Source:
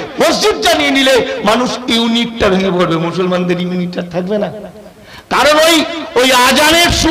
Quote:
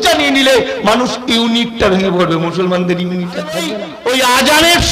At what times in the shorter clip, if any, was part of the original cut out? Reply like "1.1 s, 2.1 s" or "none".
3.8 s

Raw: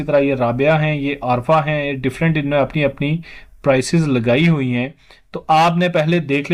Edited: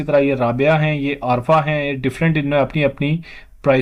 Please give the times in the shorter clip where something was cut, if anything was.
none

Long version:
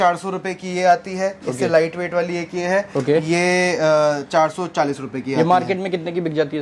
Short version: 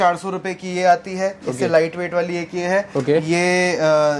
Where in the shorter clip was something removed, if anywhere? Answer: none

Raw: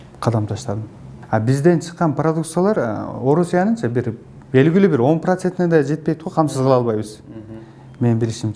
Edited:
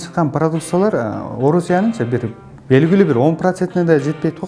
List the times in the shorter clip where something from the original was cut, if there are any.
none

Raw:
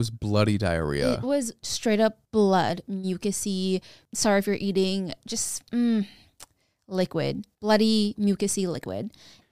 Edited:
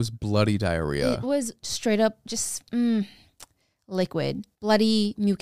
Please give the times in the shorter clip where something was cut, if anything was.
2.2 s

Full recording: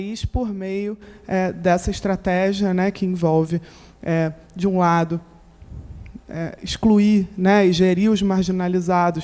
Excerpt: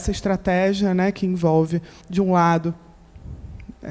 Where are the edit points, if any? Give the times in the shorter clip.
2.0 s

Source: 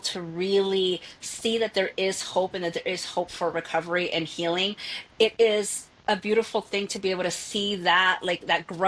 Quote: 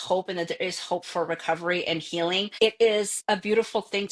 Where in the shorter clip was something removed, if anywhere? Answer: 2.5 s, 3.2 s

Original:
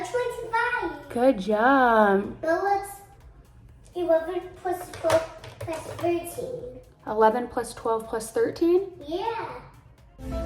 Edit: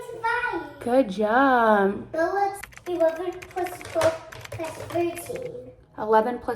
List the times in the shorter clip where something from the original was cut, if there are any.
2.7 s

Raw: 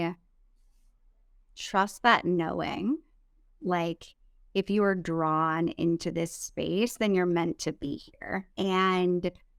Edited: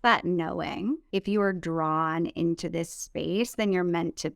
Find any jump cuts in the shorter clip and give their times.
1.0 s

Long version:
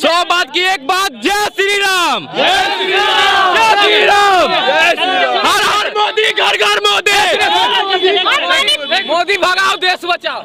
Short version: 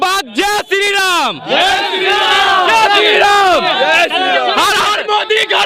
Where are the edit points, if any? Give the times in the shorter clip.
none

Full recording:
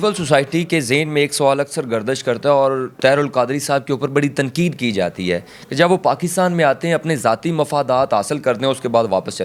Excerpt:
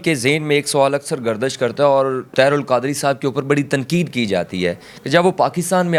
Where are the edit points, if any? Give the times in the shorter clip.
none

